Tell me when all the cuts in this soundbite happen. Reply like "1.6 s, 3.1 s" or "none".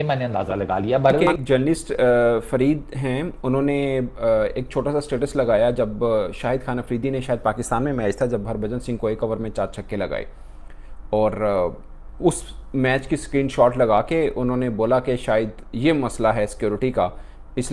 1.2 s